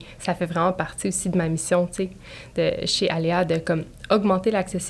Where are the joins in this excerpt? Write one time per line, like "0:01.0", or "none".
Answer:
none